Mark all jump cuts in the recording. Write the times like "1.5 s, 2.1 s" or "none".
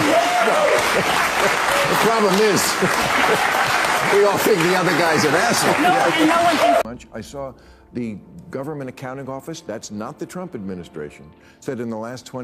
6.6 s